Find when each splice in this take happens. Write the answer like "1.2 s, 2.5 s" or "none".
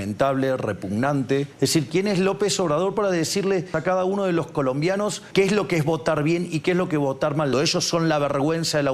1.5 s, 3.7 s, 5.2 s, 7.5 s